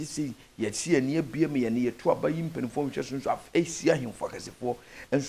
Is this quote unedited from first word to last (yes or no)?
yes